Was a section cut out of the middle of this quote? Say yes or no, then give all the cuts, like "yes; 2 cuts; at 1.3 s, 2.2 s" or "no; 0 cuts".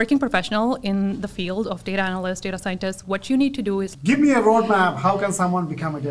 yes; 1 cut; at 3.9 s